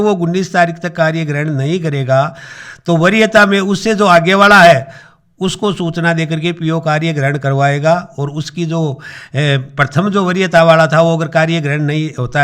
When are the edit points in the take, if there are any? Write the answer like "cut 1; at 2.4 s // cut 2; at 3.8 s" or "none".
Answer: none

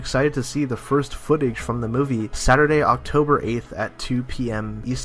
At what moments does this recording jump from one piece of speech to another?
cut 1; at 3.8 s

